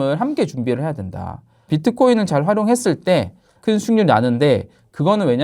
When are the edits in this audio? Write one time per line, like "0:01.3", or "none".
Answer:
0:01.7
0:03.6